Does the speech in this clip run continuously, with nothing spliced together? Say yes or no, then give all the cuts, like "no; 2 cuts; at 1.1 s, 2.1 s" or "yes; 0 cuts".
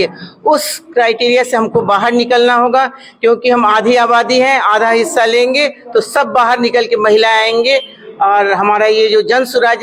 yes; 0 cuts